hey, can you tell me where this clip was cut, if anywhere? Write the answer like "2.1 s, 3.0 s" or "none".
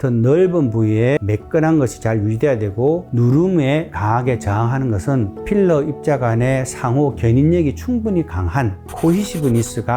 1.2 s